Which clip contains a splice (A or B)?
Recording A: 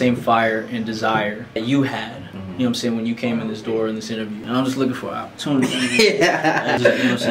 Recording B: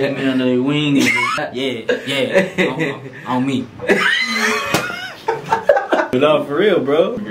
A